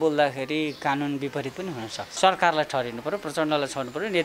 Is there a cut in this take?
yes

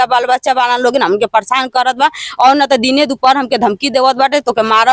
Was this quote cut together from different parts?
no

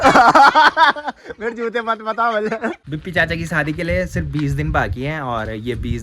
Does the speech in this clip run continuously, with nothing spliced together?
no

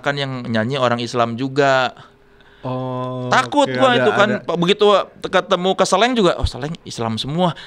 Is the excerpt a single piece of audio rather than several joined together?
yes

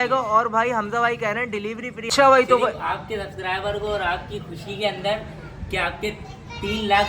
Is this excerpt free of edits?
no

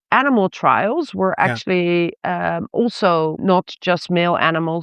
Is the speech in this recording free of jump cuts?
no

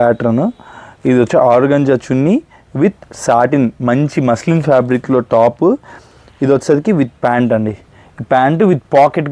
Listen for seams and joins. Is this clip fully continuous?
yes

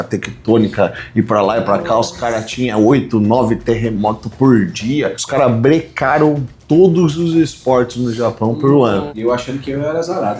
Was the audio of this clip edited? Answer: yes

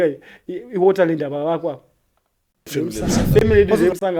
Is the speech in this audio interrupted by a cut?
yes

